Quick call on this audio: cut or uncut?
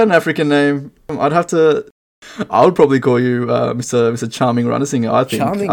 cut